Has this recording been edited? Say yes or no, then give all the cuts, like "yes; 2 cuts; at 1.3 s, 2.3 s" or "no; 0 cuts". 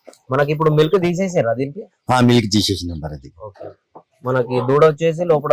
no; 0 cuts